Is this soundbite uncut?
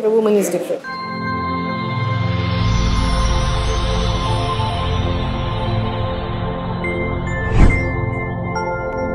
yes; 0 cuts

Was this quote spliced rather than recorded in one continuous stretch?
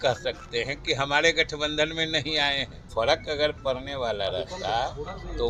yes; 1 cut; at 2.7 s

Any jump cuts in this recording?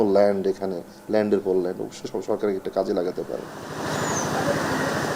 no; 0 cuts

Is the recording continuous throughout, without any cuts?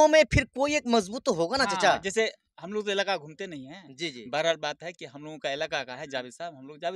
yes; 0 cuts

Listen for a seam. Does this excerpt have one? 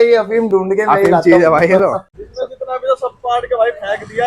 yes; 1 cut; at 2.2 s

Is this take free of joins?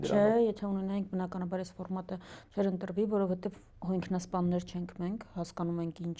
yes; 0 cuts

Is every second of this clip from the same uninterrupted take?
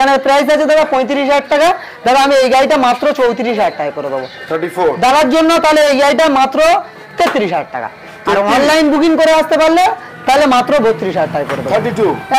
yes; 0 cuts

